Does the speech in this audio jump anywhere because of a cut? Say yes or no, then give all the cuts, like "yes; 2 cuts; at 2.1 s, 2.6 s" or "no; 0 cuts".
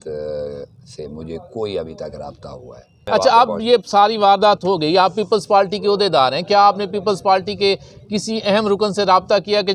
yes; 1 cut; at 3.0 s